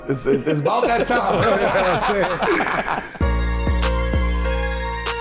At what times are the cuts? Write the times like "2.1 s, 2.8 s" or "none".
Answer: 3.2 s